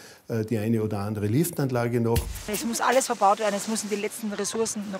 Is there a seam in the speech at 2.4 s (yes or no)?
yes